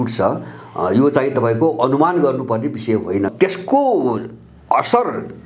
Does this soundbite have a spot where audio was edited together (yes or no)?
yes